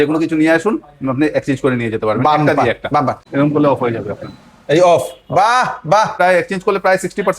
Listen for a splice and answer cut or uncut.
cut